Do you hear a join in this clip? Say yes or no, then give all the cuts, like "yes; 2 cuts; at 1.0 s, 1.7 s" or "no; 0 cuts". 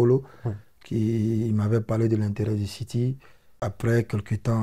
yes; 1 cut; at 3.5 s